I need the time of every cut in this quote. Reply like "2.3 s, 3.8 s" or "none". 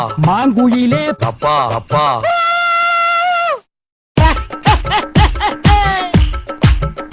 2.1 s